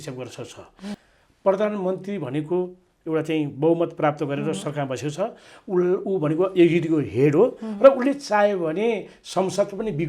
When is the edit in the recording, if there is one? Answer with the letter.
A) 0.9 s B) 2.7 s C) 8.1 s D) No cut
A